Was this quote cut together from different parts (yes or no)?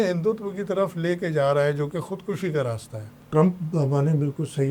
yes